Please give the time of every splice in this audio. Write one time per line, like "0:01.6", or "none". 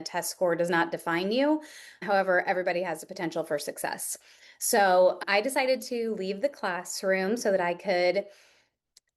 0:02.0
0:05.2